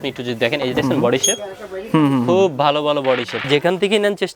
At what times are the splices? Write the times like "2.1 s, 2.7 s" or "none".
3.4 s